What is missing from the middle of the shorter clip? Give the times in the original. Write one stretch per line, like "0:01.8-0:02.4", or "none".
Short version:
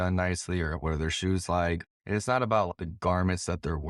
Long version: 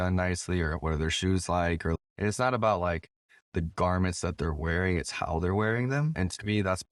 0:01.9-0:02.0
0:02.8-0:03.4